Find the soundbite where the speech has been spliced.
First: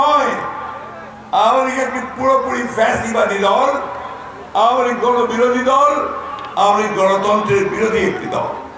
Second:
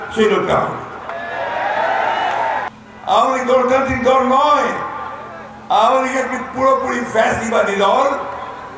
second; 1 cut; at 2.7 s

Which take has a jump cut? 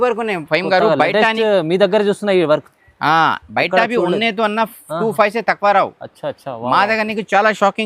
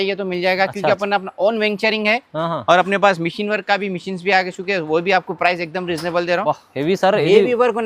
second; 1 cut; at 6.4 s

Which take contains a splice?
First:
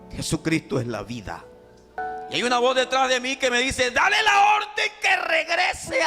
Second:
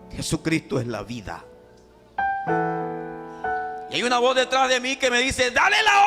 first; 1 cut; at 2.0 s

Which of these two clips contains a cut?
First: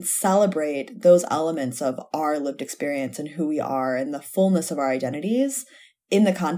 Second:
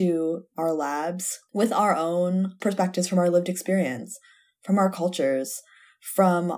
second; 2 cuts; at 1.3 s, 2.5 s

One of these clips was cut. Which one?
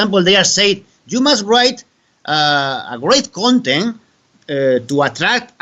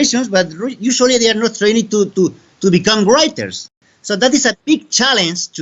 second; 1 cut; at 3.8 s

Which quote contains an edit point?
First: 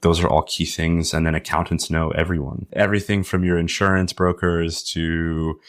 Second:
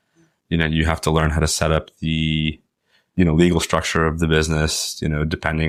first; 1 cut; at 2.7 s

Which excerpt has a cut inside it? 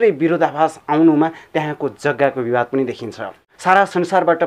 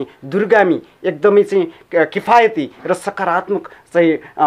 first; 1 cut; at 3.5 s

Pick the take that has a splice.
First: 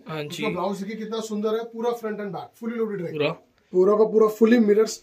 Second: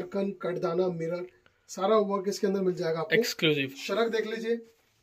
first; 1 cut; at 3.1 s

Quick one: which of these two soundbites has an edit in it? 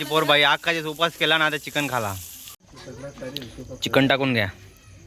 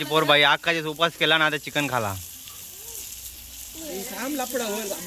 first; 1 cut; at 2.6 s

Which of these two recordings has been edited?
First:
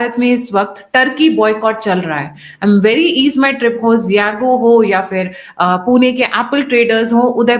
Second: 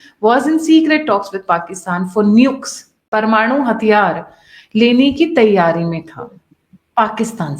second; 1 cut; at 3.1 s

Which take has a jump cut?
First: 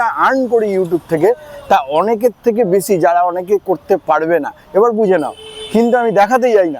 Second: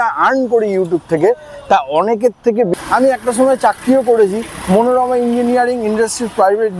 second; 1 cut; at 2.7 s

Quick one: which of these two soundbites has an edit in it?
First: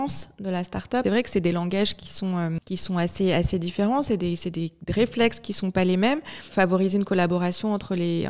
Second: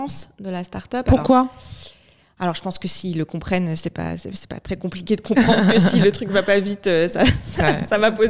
first; 3 cuts; at 1.0 s, 2.6 s, 6.5 s

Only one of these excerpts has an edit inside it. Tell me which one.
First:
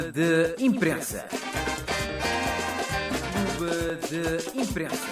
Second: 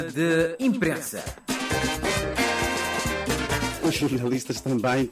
second; 2 cuts; at 1.3 s, 3.7 s

